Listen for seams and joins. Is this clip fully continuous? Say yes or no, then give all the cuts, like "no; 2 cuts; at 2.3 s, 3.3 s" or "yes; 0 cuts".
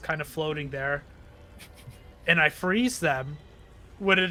yes; 0 cuts